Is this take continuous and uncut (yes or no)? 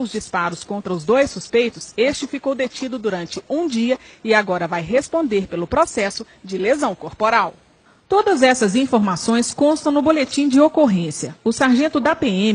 no